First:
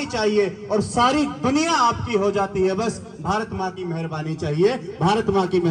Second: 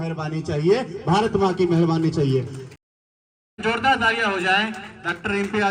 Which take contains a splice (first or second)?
second